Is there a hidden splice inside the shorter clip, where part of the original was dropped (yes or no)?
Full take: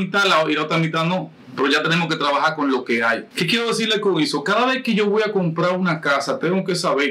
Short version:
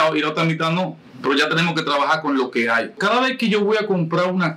yes